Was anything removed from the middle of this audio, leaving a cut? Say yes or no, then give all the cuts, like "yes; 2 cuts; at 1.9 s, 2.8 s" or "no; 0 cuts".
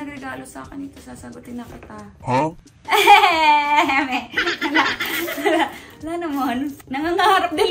no; 0 cuts